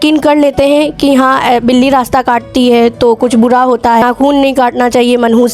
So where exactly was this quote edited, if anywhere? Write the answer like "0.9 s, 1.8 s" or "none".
4.0 s

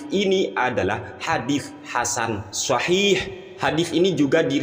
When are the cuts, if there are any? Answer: none

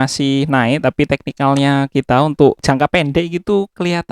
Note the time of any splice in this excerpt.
2.6 s

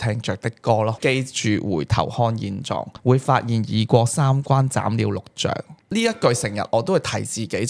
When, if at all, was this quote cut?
1.0 s, 2.9 s

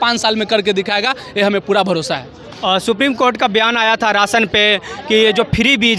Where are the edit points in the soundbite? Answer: none

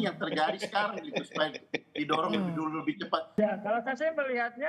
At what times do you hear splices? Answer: 3.4 s

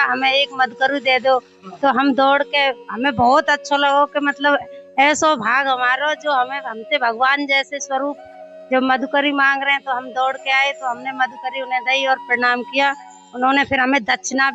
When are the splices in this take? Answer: none

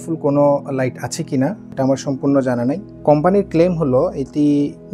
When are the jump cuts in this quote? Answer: 2.9 s

